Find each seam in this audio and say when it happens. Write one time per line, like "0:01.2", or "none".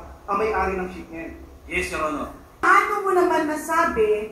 0:02.6